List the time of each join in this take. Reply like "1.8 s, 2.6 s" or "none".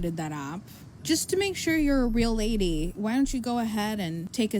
0.9 s